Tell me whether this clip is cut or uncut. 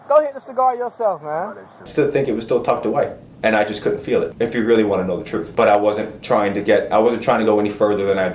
cut